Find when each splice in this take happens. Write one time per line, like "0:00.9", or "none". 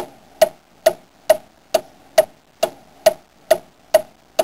0:03.2